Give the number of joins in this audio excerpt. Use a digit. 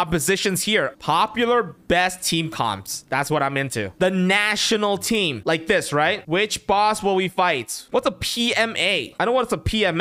4